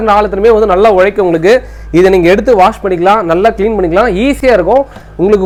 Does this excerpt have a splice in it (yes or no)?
no